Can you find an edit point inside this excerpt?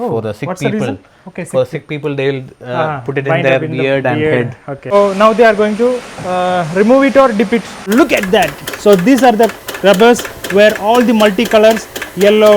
yes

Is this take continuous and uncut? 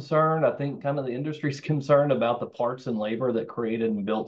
yes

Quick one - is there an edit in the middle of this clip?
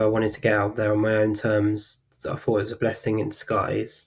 no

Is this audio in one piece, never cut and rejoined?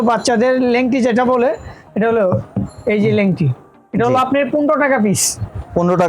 yes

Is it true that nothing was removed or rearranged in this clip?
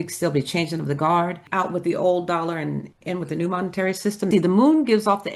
no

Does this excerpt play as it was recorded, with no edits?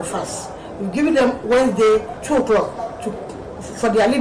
no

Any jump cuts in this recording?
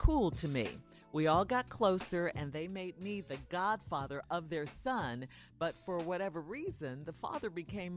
yes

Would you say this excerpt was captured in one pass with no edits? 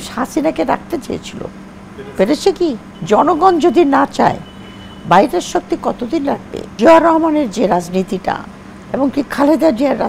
no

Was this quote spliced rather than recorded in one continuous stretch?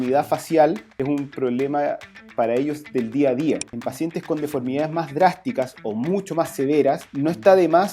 yes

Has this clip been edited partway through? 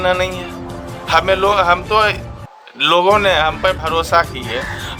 no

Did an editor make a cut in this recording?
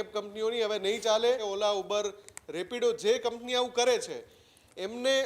yes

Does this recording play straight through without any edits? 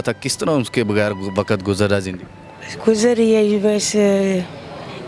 yes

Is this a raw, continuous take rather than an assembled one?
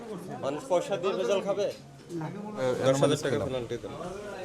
no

